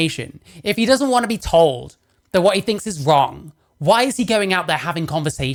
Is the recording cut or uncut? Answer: uncut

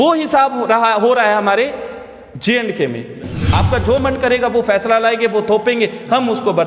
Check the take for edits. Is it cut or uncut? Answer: cut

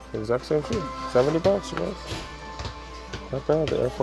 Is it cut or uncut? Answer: uncut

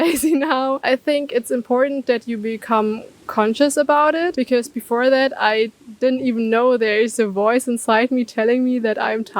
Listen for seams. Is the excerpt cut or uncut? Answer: cut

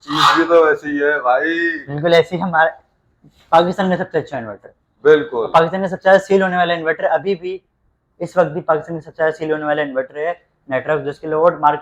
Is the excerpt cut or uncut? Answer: uncut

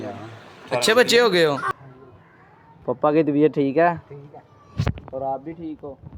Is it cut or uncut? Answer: cut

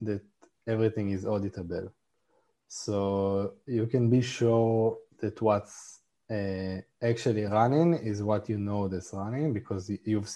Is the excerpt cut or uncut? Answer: uncut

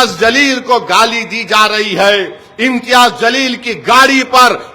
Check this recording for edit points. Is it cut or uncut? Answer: uncut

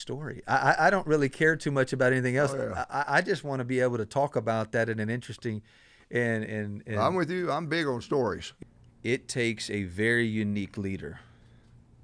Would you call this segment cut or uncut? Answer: cut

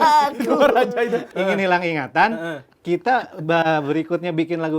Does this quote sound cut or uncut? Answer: cut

